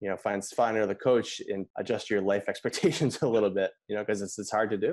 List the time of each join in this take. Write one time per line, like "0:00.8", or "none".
0:01.7